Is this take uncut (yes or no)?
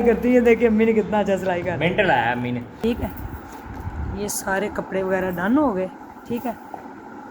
no